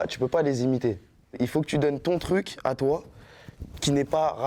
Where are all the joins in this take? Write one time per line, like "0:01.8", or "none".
0:01.4